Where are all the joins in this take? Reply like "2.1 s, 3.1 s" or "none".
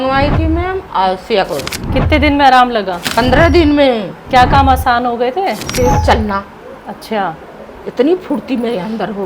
1.8 s, 3.0 s, 4.1 s, 5.6 s